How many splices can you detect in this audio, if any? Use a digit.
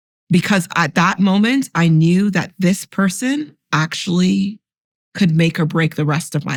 0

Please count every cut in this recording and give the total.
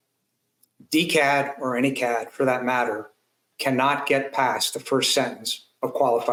0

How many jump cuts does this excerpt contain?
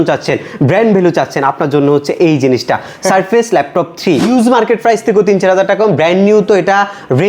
1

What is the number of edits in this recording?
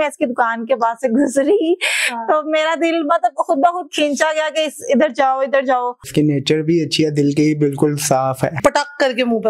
2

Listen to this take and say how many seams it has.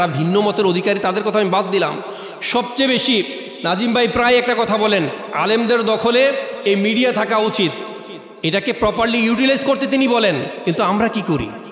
0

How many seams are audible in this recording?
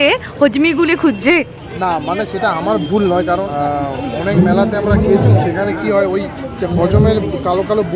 0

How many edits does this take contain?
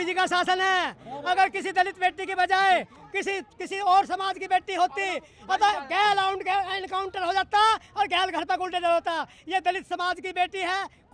0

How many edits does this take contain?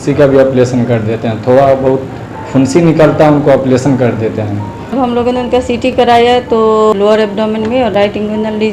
2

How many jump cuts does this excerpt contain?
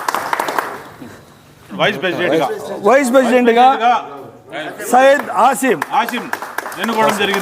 1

